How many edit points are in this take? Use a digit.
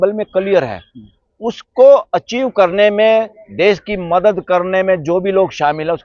0